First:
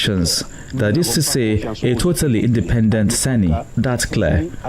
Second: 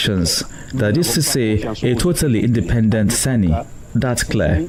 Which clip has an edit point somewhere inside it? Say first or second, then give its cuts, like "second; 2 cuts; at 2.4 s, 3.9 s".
first; 1 cut; at 3.7 s